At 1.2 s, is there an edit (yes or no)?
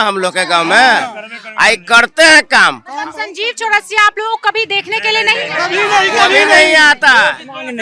no